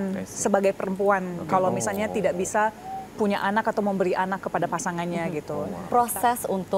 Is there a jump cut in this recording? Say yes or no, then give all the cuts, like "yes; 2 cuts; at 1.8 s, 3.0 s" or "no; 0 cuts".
yes; 1 cut; at 5.8 s